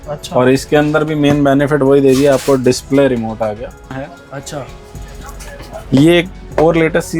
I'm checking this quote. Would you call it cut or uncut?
cut